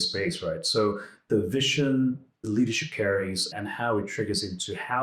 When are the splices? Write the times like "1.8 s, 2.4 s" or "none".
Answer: 2.5 s